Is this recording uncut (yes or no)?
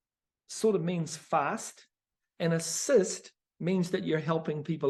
yes